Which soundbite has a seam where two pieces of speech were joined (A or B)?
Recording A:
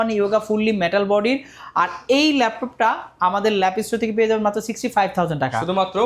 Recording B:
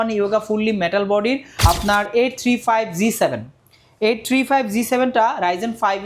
B